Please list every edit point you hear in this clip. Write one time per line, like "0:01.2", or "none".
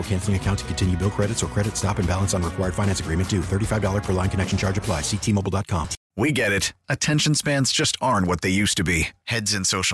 0:06.0

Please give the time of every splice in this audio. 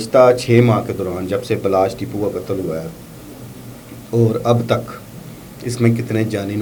none

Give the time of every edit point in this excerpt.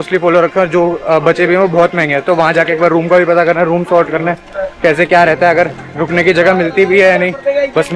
none

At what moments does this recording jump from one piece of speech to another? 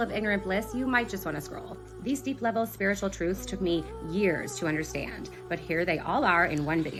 none

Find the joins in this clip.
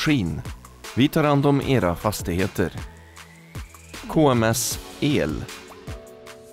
0:05.4

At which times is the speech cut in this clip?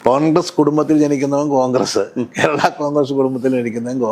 none

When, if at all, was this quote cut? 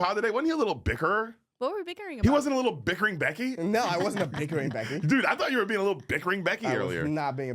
0:01.4

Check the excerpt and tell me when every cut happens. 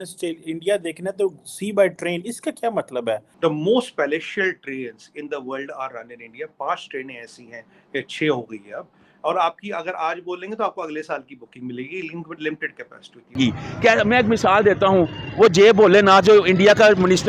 0:03.3
0:13.4

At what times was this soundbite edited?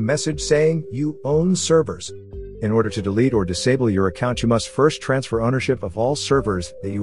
none

